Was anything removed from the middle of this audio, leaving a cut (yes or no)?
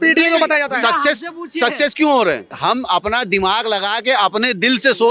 yes